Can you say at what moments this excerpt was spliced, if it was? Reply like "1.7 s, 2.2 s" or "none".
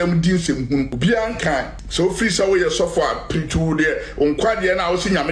0.9 s, 1.8 s